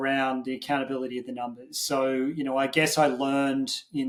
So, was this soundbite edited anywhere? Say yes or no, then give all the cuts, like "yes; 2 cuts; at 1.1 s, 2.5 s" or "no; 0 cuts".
no; 0 cuts